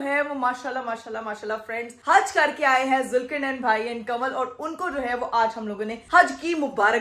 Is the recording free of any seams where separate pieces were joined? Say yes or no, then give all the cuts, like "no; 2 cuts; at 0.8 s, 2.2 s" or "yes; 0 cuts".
yes; 0 cuts